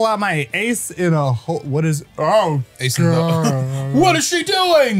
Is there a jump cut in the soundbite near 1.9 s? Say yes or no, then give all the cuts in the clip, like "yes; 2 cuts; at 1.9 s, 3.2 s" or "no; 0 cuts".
no; 0 cuts